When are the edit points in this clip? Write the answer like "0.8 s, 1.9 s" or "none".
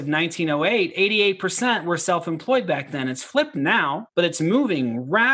4.0 s